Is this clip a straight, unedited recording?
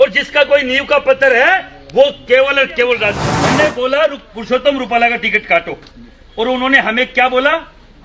no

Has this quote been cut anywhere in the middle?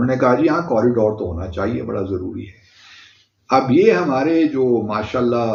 no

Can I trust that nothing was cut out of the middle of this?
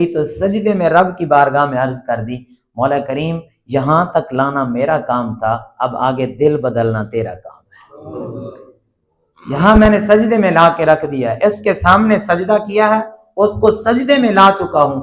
yes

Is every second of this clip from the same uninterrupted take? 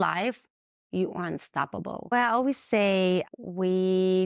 no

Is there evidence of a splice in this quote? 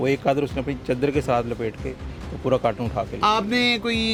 no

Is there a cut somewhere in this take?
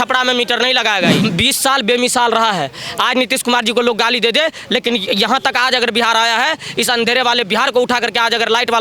yes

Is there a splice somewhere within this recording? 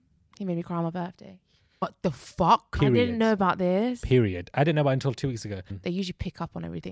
yes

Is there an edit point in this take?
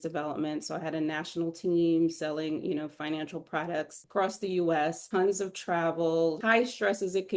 yes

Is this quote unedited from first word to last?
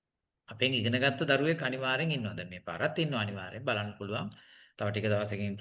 yes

